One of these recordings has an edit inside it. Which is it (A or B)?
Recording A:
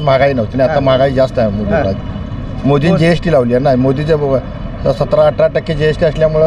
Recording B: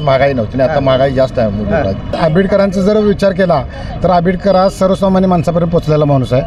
B